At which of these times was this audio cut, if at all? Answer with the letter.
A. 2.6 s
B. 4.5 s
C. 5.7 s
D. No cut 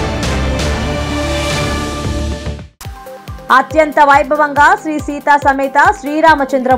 A